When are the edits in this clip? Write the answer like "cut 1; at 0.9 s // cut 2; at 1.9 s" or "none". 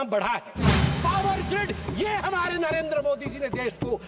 cut 1; at 0.9 s